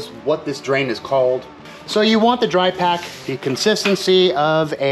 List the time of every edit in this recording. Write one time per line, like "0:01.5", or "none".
0:01.6